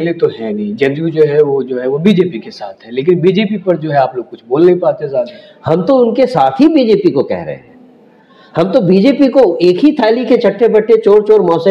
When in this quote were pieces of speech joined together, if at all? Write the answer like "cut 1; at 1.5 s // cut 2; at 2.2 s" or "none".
none